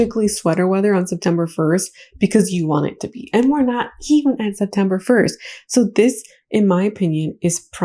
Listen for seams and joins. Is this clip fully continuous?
yes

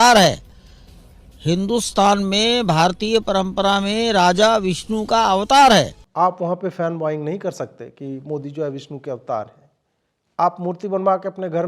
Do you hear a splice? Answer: yes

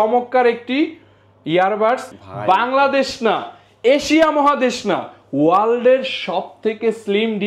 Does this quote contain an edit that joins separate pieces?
yes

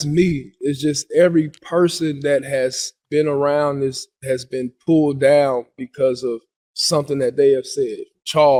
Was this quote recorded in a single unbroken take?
yes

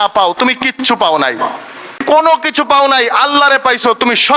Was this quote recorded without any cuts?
no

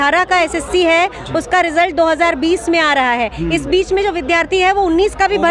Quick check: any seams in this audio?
no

